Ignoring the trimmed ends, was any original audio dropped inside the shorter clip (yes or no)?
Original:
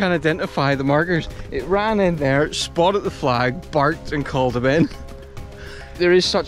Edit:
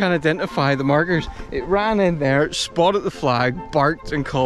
no